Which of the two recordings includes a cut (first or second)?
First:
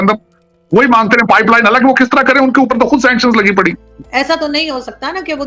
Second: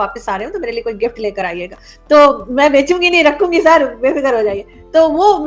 first